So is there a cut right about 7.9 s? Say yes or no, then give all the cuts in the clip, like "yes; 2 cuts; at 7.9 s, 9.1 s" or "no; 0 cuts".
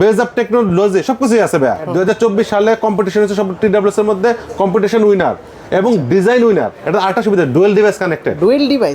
no; 2 cuts; at 1.9 s, 6.7 s